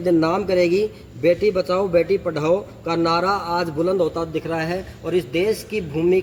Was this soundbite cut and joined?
no; 0 cuts

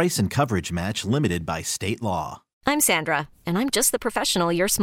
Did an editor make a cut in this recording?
yes; 1 cut; at 2.4 s

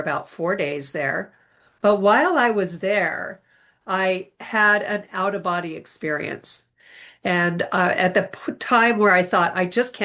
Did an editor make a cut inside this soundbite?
no; 0 cuts

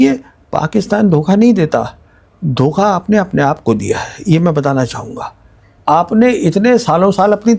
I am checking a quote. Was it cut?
yes; 1 cut; at 5.7 s

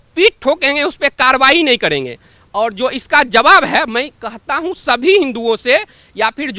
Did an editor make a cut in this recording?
no; 0 cuts

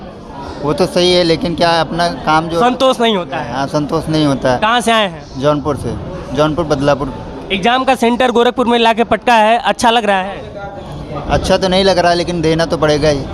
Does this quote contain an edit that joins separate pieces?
no; 0 cuts

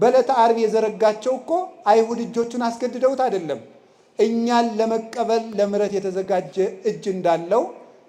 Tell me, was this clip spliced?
no; 0 cuts

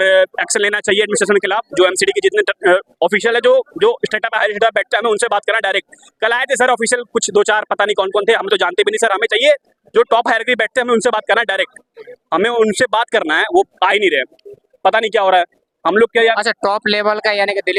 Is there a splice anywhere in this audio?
no; 0 cuts

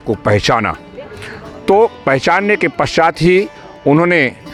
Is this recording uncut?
yes; 0 cuts

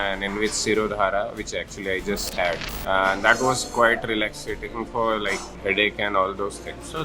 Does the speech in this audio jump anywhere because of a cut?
yes; 2 cuts; at 2.7 s, 5.5 s

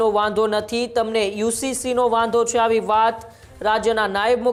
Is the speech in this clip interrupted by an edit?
no; 0 cuts

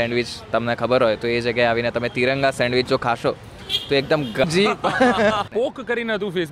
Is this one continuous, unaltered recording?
no; 2 cuts; at 4.4 s, 5.5 s

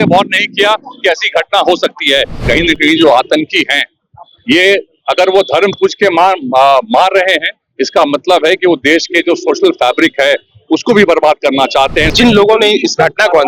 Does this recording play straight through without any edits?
no; 2 cuts; at 2.4 s, 12.1 s

